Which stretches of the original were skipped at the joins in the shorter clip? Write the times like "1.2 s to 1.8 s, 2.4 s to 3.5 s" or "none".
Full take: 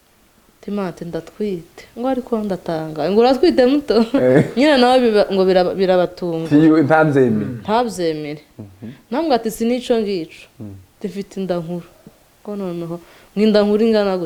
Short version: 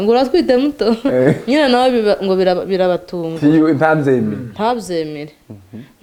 none